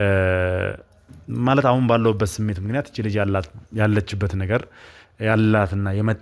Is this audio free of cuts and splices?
yes; 0 cuts

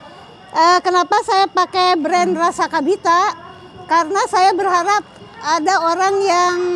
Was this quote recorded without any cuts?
yes; 0 cuts

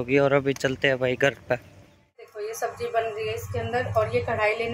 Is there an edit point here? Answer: yes; 1 cut; at 2.3 s

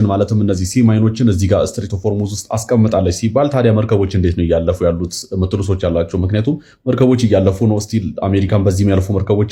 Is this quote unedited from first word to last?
yes; 0 cuts

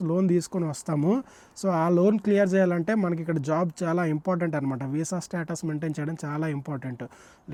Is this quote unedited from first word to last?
yes; 0 cuts

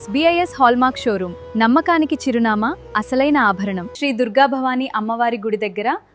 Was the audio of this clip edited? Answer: yes; 1 cut; at 3.9 s

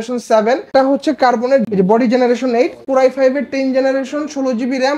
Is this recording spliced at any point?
yes; 3 cuts; at 0.7 s, 1.7 s, 2.8 s

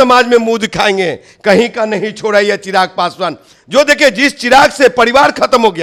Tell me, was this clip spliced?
no; 0 cuts

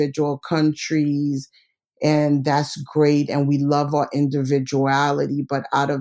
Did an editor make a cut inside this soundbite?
no; 0 cuts

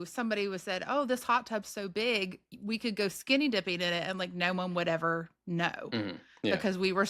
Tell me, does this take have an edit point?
no; 0 cuts

